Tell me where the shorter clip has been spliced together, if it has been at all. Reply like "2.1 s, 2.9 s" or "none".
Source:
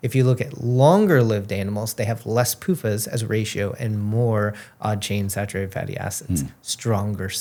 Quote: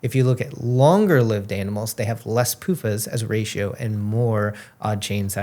none